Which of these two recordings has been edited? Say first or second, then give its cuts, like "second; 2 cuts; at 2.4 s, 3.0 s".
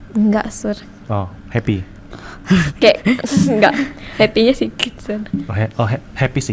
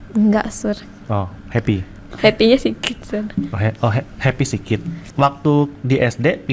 second; 2 cuts; at 2.0 s, 5.0 s